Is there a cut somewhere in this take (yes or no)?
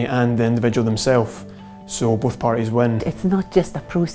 yes